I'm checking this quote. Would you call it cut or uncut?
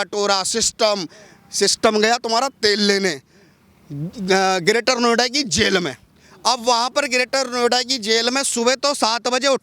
uncut